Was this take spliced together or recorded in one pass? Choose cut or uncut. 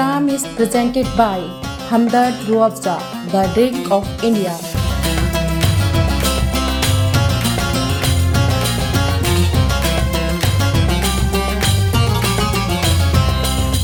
uncut